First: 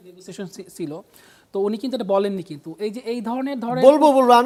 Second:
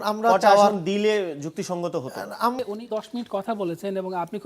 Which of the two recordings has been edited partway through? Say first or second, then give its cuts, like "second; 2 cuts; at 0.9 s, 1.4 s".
second; 1 cut; at 2.6 s